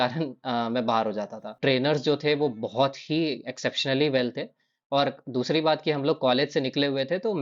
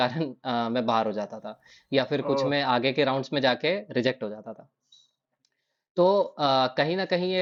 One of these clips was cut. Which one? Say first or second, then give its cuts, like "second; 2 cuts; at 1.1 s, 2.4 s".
first; 1 cut; at 1.6 s